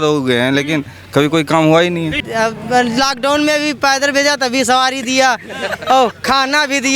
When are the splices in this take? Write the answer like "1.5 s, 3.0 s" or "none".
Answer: 2.2 s